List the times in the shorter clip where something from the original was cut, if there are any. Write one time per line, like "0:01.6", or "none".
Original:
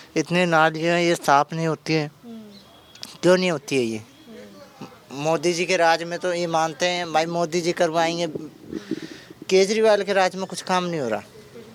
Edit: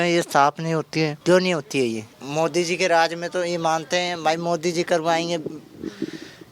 0:01.2
0:02.1